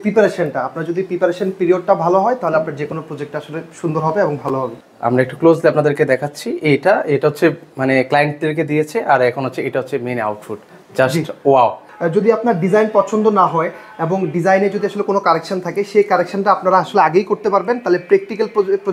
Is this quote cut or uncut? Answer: cut